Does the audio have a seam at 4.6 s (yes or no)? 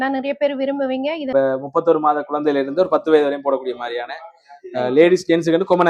no